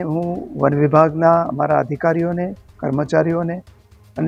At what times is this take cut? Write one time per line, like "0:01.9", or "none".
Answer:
none